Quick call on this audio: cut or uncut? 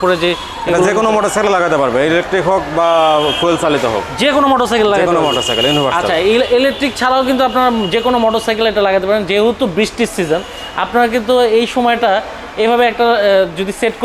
uncut